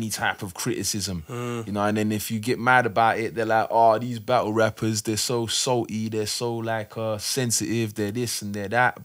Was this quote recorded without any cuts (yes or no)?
yes